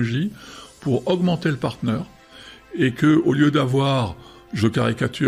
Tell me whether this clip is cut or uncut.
uncut